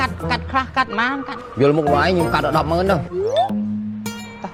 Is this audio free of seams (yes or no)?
yes